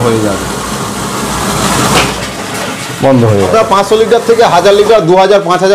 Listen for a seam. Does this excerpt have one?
yes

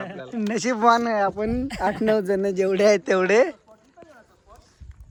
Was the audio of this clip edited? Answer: no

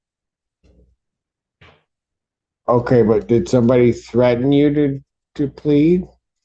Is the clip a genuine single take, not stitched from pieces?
yes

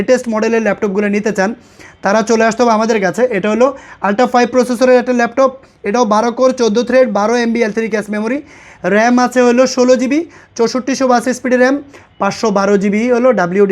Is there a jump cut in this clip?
no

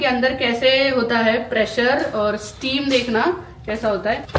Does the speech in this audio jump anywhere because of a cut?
no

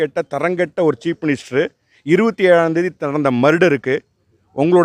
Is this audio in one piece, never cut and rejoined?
yes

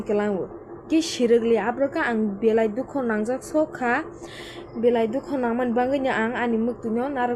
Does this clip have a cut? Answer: no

